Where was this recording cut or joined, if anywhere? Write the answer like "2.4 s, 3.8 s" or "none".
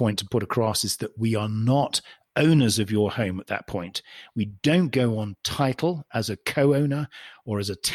none